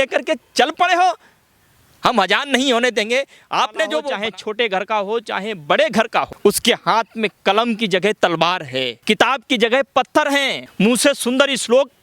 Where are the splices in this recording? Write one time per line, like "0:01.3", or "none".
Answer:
0:04.0
0:06.3
0:09.0
0:10.6